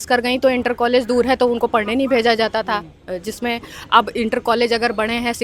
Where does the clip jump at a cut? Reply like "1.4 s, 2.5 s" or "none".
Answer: none